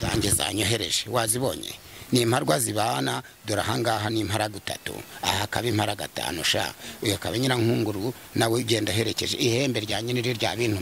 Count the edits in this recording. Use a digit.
0